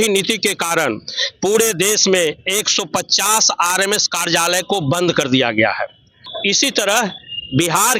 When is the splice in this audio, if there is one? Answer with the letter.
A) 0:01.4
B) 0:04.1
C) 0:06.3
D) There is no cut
C